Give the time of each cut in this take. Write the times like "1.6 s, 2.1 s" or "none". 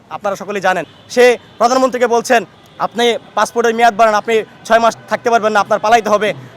1.0 s, 2.6 s